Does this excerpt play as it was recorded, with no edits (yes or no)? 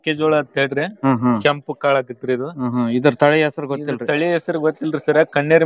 yes